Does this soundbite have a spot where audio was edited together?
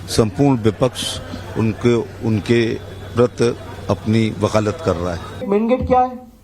yes; 1 cut; at 3.7 s

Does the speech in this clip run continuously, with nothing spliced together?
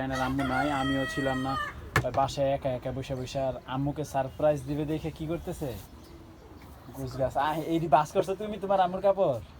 yes; 0 cuts

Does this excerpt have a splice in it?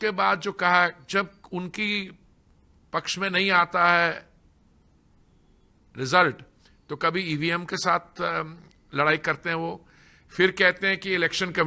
no; 0 cuts

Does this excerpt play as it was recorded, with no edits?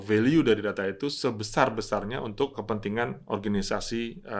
no; 1 cut; at 2.6 s

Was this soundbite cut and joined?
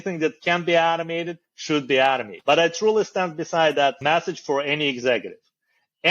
yes; 2 cuts; at 2.3 s, 4.0 s

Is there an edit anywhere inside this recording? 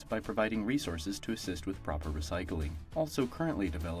no; 0 cuts

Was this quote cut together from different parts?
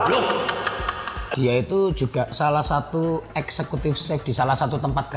yes; 1 cut; at 1.3 s

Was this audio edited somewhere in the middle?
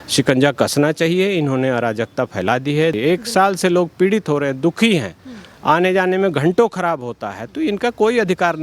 yes; 1 cut; at 3.0 s

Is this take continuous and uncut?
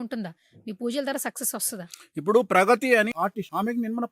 no; 1 cut; at 3.1 s

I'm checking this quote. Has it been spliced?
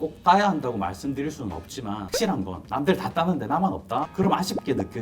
yes; 1 cut; at 4.1 s

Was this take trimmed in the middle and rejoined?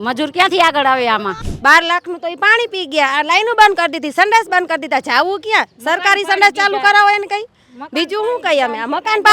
yes; 1 cut; at 1.5 s

